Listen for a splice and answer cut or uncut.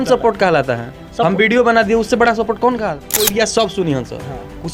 cut